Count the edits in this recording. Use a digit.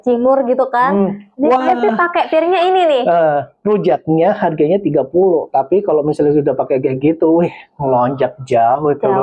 0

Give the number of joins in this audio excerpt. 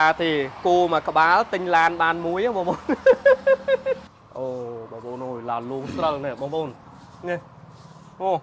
1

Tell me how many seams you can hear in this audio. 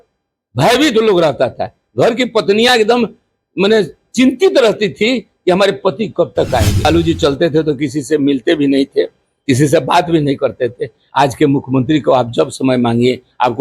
1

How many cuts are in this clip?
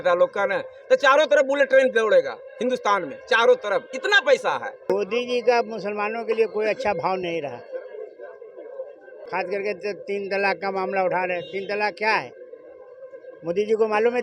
1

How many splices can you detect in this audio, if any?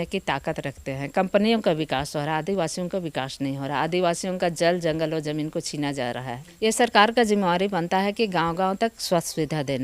1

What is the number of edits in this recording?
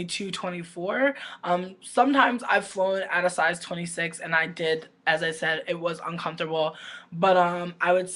0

